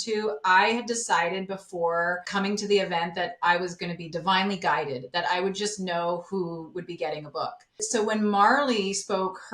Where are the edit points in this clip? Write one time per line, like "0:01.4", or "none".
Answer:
0:02.2
0:07.8